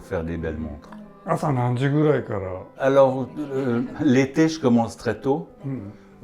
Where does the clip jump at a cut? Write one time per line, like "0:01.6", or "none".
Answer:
none